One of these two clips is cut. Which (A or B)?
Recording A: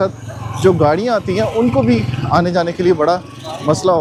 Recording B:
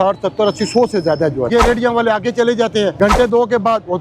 B